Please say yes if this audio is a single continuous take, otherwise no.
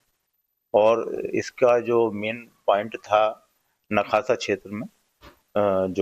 no